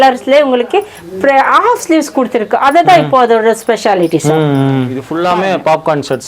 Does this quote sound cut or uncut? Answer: cut